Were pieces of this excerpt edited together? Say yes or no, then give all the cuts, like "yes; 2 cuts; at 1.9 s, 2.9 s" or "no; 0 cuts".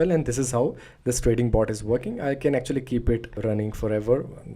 yes; 1 cut; at 3.4 s